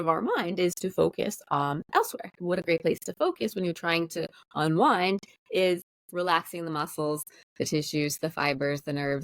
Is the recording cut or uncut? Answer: cut